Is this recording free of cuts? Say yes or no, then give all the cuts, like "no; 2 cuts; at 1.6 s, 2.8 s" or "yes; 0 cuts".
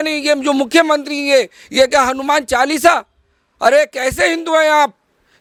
yes; 0 cuts